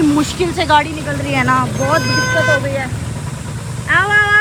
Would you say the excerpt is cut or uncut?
uncut